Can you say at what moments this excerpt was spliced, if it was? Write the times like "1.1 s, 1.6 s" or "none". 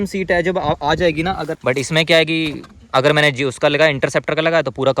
1.5 s